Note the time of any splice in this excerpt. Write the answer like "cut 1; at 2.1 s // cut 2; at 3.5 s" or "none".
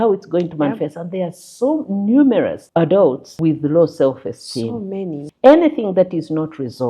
cut 1; at 2.6 s // cut 2; at 3.3 s // cut 3; at 5.3 s